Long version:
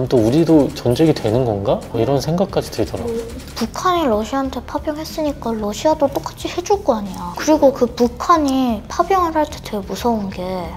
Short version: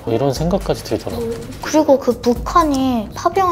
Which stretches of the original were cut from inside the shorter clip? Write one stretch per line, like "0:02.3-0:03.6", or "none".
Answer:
0:03.4-0:07.3